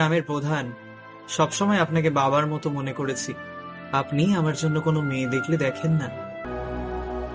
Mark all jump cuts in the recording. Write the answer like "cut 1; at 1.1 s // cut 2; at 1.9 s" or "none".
cut 1; at 6.4 s